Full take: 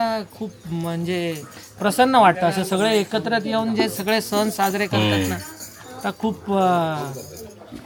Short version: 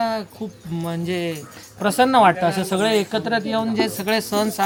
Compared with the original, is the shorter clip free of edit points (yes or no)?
yes